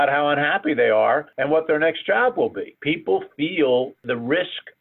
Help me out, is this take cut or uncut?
cut